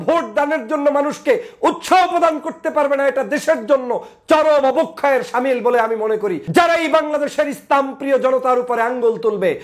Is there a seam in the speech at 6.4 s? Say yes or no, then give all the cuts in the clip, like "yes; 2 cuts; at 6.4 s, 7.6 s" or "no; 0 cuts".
yes; 1 cut; at 6.4 s